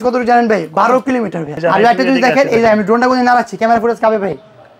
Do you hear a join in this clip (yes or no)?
yes